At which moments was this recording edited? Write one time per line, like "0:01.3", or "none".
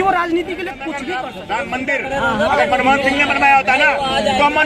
0:01.1